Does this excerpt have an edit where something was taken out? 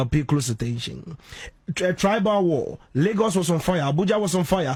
no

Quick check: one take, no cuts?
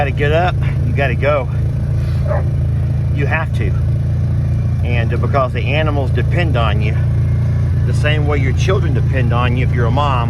yes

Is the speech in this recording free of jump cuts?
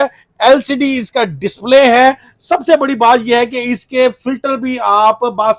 yes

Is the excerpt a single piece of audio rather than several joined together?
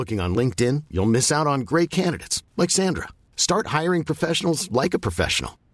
yes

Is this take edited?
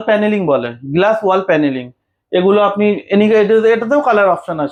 no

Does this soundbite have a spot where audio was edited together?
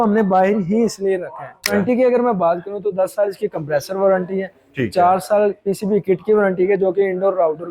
yes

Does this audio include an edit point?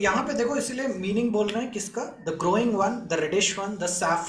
no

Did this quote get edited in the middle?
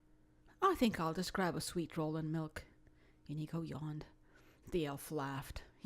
yes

